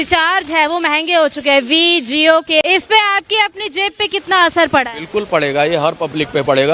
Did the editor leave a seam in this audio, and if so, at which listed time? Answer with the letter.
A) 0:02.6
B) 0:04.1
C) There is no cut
A